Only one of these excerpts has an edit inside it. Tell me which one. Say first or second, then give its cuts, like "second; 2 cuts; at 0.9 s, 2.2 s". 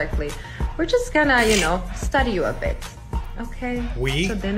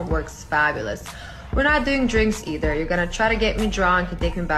second; 1 cut; at 1.1 s